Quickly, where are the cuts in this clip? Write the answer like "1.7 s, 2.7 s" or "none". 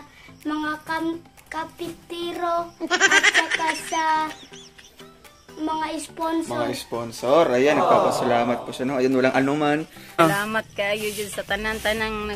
10.2 s